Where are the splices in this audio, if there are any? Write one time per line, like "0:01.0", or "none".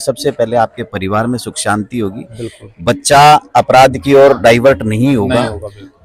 none